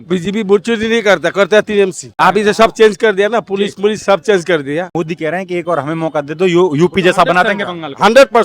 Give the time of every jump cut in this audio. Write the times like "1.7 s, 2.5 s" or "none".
2.0 s, 4.9 s